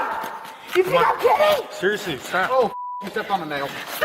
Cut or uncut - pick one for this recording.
uncut